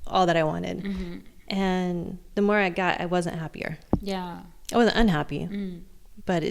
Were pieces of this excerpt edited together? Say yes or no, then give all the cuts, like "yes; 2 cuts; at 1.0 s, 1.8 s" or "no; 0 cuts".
no; 0 cuts